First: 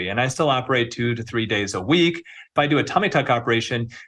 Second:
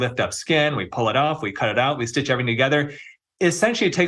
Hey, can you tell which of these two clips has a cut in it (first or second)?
first